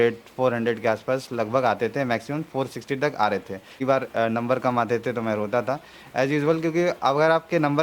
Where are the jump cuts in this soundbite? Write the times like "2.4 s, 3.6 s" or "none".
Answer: 3.8 s

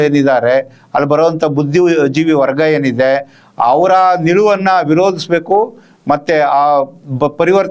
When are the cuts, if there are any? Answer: none

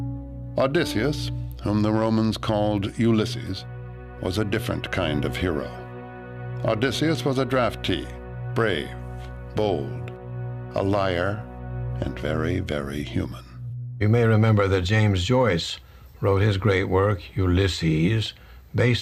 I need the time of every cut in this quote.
none

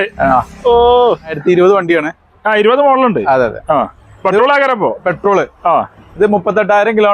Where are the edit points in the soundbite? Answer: 1.4 s

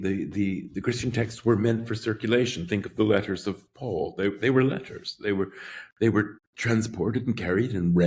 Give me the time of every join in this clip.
6.5 s

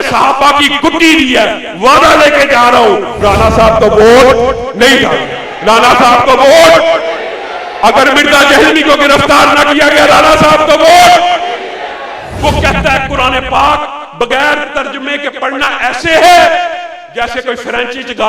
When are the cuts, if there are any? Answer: 3.2 s, 12.3 s

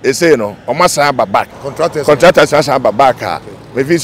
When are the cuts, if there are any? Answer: 1.6 s

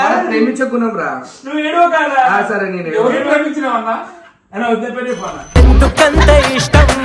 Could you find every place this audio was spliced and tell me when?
none

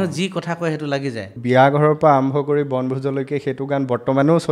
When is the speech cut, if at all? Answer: 1.4 s

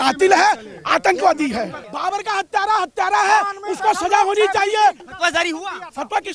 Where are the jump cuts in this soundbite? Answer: 1.9 s, 5.1 s

